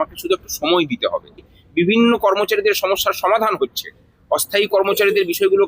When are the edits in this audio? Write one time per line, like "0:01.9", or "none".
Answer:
0:01.6

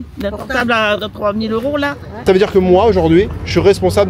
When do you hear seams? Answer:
0:02.2

